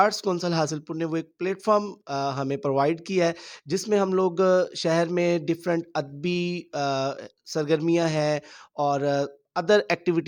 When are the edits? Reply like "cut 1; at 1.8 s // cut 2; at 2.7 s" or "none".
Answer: none